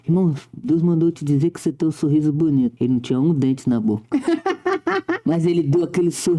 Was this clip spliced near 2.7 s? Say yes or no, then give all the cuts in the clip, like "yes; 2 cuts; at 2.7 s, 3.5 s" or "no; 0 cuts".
yes; 1 cut; at 2.7 s